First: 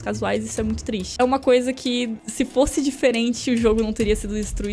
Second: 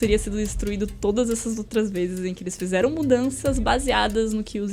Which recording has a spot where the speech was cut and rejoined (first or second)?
first